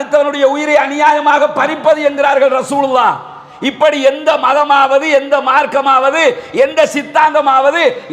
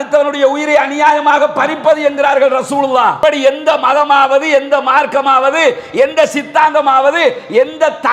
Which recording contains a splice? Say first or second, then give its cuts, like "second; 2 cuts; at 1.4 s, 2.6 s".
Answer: second; 1 cut; at 3.2 s